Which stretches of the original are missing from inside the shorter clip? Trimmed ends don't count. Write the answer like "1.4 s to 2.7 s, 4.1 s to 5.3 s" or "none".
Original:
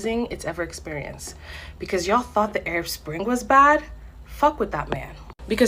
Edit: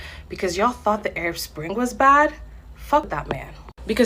4.6 s to 4.7 s